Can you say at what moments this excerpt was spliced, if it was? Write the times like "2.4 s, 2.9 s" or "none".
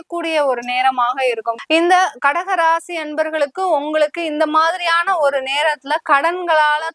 1.6 s